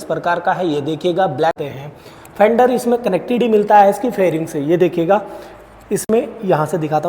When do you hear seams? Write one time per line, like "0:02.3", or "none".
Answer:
0:01.6